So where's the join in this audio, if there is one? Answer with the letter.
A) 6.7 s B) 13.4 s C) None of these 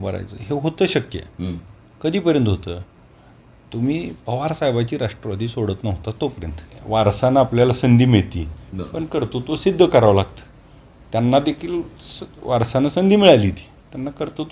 A